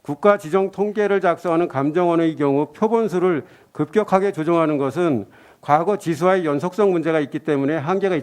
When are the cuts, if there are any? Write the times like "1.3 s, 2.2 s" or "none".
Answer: none